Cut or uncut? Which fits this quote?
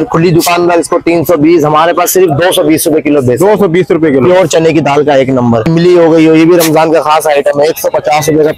cut